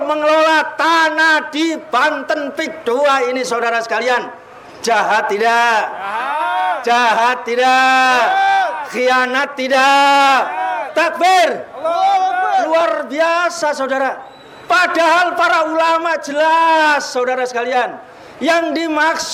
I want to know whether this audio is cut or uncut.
uncut